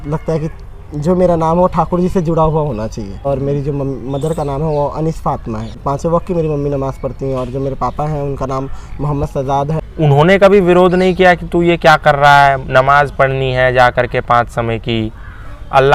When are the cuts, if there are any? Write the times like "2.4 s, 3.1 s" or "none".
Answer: 3.3 s, 5.8 s, 9.8 s